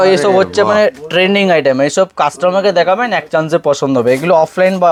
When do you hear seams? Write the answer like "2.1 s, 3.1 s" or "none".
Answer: none